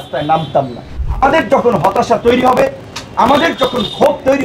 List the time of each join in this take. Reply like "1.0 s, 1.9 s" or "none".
0.9 s